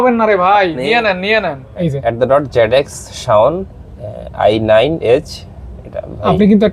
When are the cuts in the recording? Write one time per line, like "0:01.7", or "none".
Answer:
0:01.8

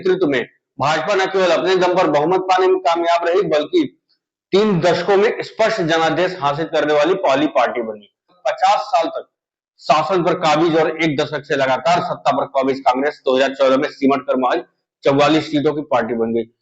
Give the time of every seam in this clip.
0:08.4

